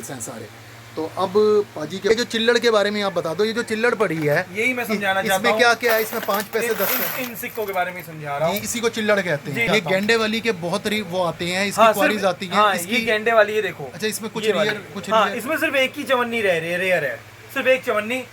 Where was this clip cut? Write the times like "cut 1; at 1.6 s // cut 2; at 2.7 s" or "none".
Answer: cut 1; at 2.1 s // cut 2; at 9.6 s